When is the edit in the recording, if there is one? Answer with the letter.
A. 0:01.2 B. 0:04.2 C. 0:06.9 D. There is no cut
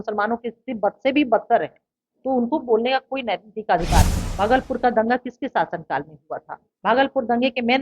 B